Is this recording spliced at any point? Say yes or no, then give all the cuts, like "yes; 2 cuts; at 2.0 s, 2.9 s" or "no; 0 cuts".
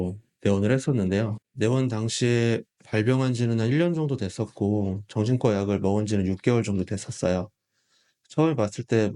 yes; 1 cut; at 1.4 s